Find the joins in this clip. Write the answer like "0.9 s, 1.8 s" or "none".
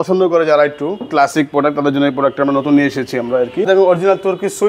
3.7 s